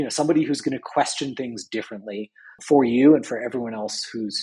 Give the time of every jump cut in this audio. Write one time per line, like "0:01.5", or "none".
0:02.6